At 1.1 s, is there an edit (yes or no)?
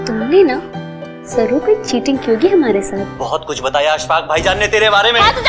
no